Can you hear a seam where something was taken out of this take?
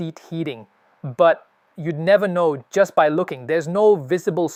no; 0 cuts

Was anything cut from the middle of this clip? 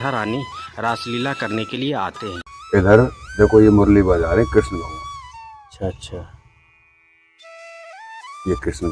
yes; 1 cut; at 2.5 s

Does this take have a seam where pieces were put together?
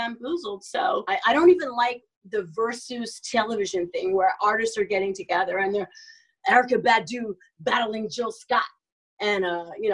yes; 1 cut; at 1.0 s

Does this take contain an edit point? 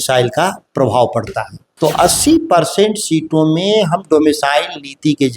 yes; 1 cut; at 1.8 s

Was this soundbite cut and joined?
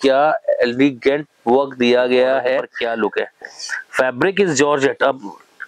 yes; 1 cut; at 2.7 s

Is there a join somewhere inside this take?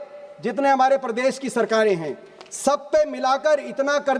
no; 0 cuts

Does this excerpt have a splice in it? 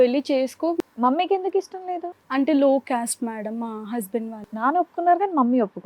yes; 2 cuts; at 0.8 s, 2.1 s

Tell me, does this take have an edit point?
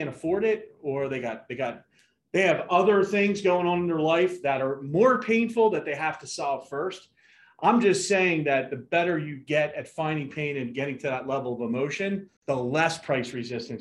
yes; 1 cut; at 12.3 s

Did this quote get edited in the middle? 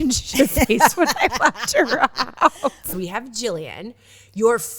yes; 1 cut; at 2.8 s

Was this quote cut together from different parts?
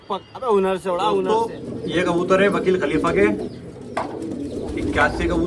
yes; 1 cut; at 1.2 s

